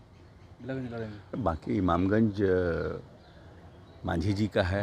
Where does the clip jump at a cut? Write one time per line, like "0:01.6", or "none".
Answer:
0:01.3